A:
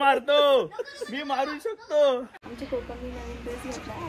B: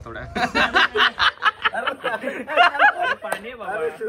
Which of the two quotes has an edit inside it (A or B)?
A